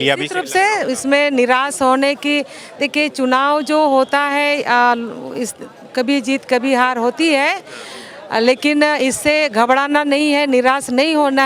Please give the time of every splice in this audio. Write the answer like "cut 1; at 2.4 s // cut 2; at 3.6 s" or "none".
none